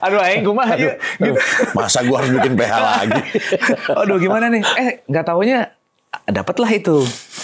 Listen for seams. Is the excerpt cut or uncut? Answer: uncut